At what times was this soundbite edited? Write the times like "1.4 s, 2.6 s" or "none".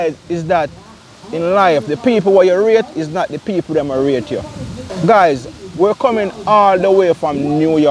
4.9 s

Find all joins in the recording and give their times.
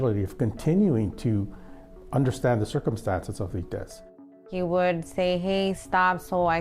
4.3 s

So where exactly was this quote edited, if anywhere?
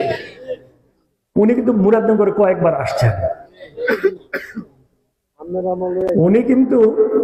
none

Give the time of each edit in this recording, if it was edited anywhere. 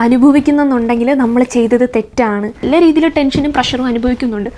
2.6 s

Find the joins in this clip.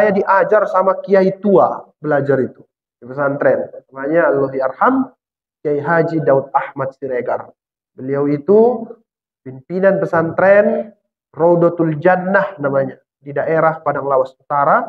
none

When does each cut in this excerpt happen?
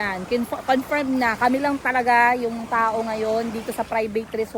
none

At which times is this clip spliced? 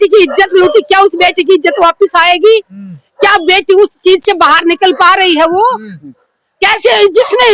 none

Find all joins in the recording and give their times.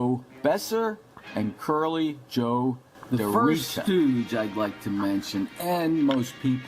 3.8 s

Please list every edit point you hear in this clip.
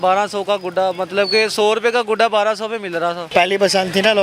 3.3 s

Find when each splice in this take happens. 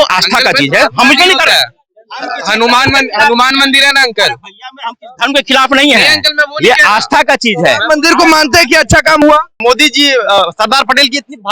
9.6 s

